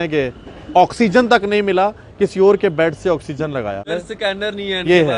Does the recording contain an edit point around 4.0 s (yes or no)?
yes